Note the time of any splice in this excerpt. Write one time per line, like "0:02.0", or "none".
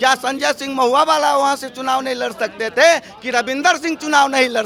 none